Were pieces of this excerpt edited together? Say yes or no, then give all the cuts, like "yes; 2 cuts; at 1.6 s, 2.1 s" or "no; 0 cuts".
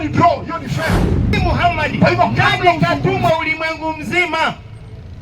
yes; 1 cut; at 2.8 s